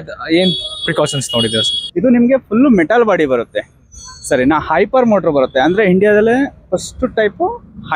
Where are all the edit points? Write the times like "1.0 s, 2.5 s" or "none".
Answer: 1.8 s